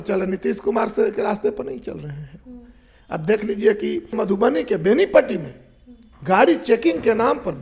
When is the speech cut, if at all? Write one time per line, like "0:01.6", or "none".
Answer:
0:04.2

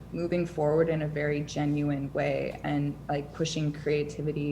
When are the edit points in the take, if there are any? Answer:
none

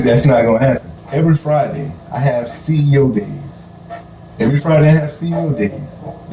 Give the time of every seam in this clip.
0:01.0

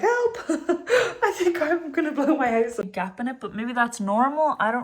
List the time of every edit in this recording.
0:02.8

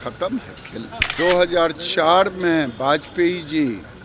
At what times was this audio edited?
0:01.0

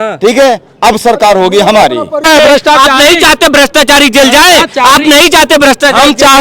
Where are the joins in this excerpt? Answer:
0:02.2

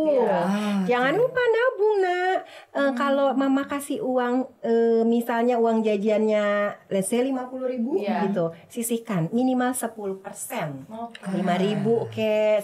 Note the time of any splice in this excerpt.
none

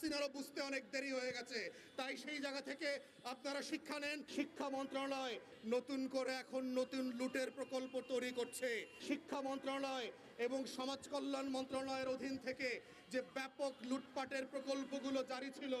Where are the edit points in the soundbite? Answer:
0:04.2
0:05.5
0:08.9

